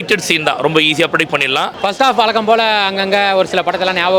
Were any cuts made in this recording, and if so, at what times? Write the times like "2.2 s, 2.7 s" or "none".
1.7 s

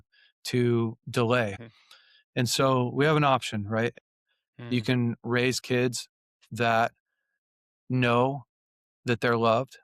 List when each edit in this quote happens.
1.6 s, 3.9 s

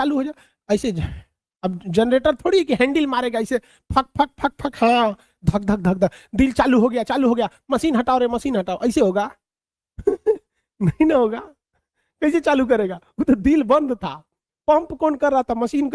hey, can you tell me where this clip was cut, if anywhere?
none

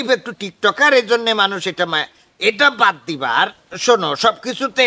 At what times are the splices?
none

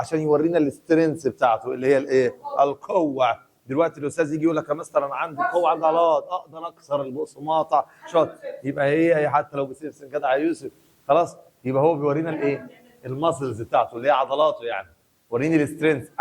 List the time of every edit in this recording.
none

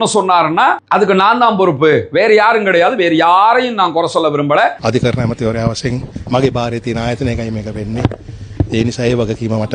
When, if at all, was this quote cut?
4.8 s

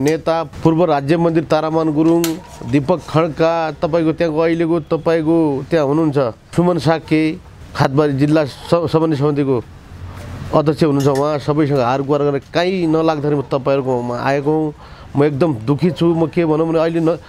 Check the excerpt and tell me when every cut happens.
none

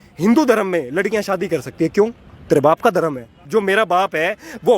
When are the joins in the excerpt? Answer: 3.4 s

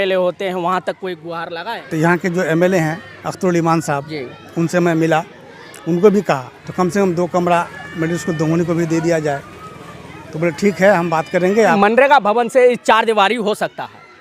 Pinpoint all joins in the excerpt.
1.9 s, 6.6 s, 11.7 s

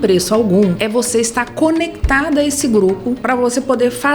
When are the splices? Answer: 0.8 s, 3.2 s

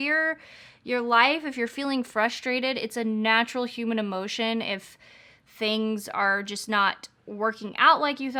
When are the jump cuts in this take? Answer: none

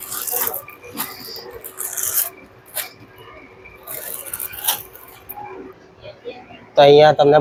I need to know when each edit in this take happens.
none

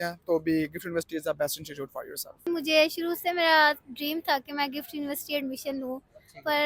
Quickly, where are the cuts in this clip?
none

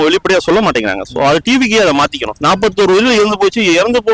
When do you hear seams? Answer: 2.4 s

